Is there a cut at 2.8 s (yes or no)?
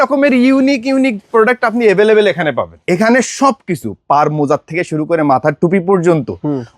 yes